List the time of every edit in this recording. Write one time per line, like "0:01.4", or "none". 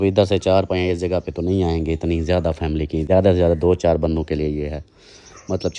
none